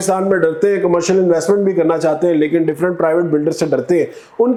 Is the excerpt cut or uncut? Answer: uncut